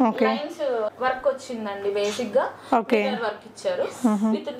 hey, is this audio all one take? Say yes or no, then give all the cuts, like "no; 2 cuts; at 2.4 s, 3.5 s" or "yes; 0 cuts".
yes; 0 cuts